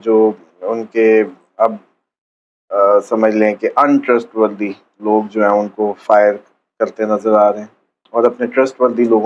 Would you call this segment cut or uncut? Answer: uncut